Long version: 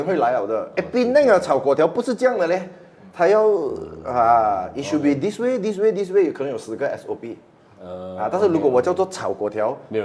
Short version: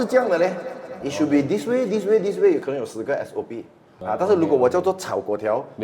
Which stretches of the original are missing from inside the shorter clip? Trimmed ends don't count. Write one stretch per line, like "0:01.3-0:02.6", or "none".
0:03.1-0:04.7
0:07.7-0:08.1